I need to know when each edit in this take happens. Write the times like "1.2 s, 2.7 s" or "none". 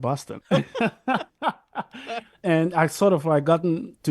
2.4 s

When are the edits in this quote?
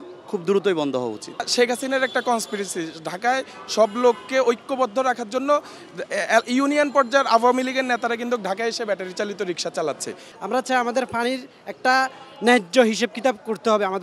1.4 s, 10.2 s

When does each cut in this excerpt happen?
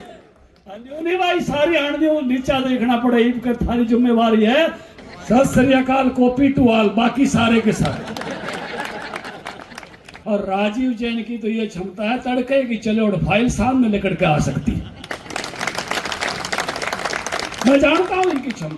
4.8 s, 10.1 s

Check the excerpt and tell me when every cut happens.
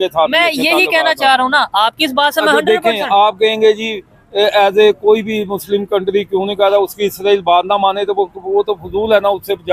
none

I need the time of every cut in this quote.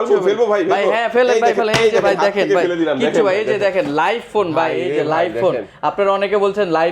none

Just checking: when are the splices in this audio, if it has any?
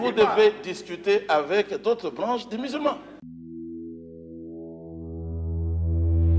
3.2 s

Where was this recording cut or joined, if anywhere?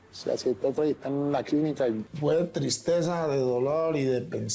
2.1 s

